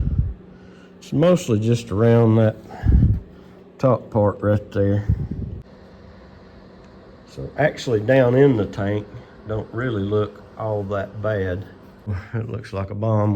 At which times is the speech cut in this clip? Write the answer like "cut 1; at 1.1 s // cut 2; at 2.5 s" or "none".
cut 1; at 5.6 s // cut 2; at 12.1 s